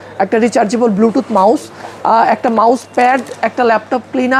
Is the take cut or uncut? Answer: uncut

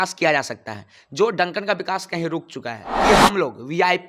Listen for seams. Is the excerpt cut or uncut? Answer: cut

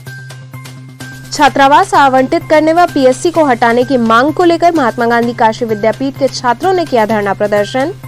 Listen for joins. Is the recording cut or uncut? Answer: uncut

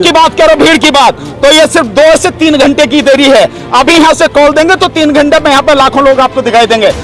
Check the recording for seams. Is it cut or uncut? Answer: uncut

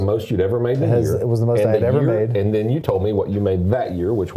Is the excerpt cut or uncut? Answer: uncut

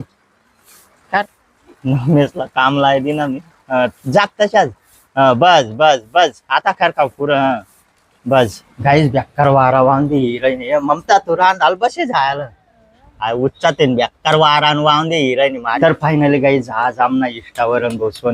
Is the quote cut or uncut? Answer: cut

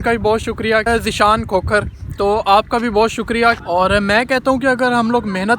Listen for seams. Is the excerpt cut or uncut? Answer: cut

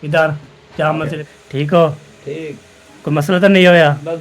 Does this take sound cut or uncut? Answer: cut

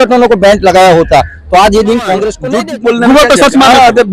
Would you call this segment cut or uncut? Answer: cut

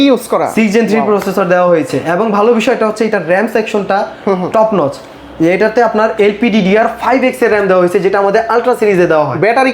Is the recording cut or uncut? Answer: uncut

